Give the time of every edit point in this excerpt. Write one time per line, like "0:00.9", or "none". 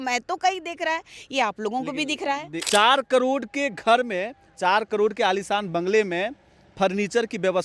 0:02.6